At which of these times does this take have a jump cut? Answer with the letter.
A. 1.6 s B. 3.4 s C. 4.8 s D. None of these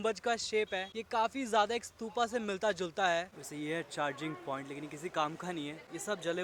B